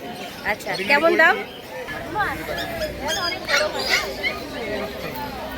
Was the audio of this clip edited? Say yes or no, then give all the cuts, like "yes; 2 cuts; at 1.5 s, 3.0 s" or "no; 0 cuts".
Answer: yes; 1 cut; at 1.9 s